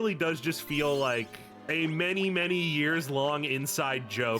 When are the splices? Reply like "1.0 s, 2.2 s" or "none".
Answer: 1.7 s